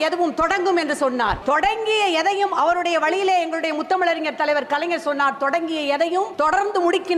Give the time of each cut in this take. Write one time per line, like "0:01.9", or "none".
0:01.4
0:06.3